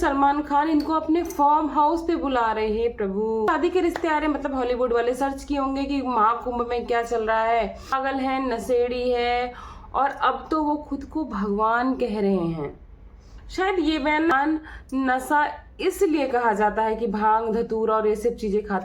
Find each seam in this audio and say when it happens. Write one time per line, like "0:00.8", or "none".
0:03.5
0:08.0
0:14.3